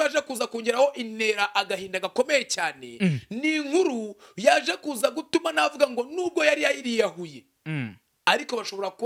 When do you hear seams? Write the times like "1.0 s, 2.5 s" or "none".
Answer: none